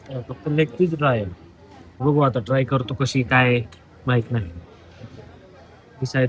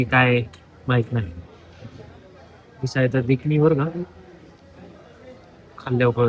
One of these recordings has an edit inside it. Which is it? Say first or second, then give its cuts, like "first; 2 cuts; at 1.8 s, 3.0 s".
first; 1 cut; at 2.0 s